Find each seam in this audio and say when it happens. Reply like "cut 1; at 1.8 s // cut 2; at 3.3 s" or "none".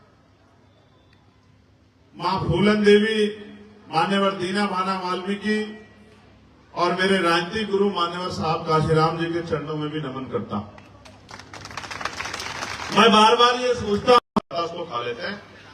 cut 1; at 14.2 s